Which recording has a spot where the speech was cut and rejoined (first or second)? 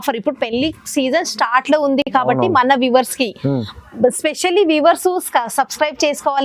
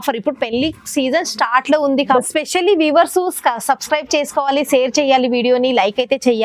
second